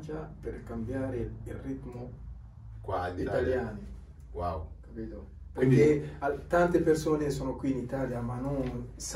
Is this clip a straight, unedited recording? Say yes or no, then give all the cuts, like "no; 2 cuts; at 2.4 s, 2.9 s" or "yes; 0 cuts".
yes; 0 cuts